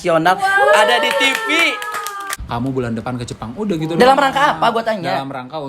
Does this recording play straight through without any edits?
no; 1 cut; at 2.3 s

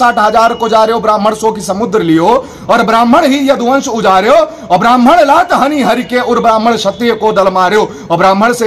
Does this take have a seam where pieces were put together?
no; 0 cuts

